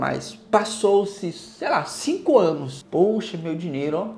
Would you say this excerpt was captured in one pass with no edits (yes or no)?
no